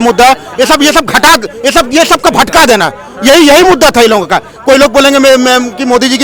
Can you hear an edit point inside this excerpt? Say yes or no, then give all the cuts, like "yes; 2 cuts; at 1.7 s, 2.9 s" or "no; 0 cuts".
no; 0 cuts